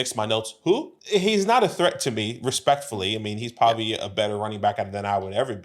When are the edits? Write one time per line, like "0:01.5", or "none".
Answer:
0:00.9